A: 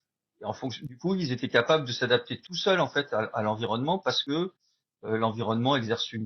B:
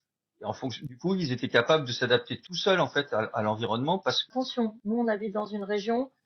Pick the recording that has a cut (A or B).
B